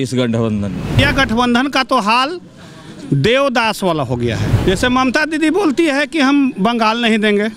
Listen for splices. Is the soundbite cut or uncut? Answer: cut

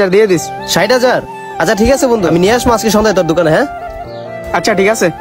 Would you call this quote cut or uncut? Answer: uncut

